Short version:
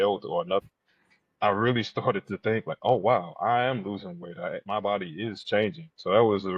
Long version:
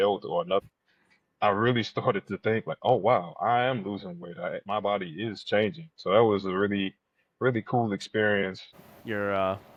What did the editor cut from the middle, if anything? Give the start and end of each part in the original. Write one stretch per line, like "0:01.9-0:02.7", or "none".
none